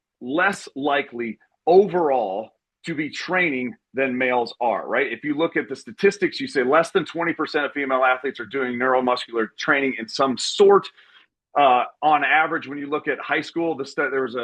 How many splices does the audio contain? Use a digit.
0